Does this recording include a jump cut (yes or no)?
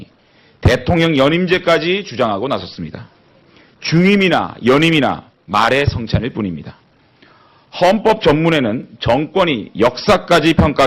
yes